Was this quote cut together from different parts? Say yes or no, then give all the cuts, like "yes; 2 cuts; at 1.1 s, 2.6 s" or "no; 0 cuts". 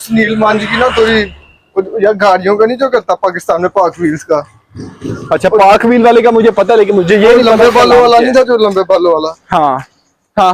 no; 0 cuts